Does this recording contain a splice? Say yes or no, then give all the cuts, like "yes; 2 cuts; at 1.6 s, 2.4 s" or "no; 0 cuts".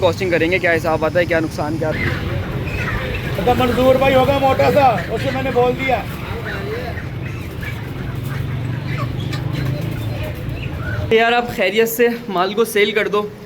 yes; 2 cuts; at 1.9 s, 11.0 s